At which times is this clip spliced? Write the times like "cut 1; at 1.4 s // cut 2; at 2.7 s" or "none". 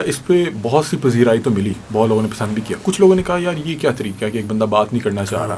none